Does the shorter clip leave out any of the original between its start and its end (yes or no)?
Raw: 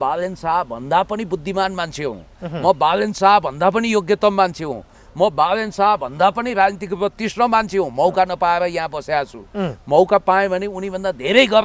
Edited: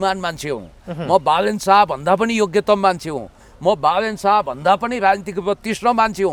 no